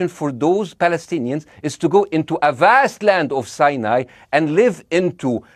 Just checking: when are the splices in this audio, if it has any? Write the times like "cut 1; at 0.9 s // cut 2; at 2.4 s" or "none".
none